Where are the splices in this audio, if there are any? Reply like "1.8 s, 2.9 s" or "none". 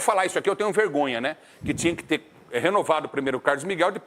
none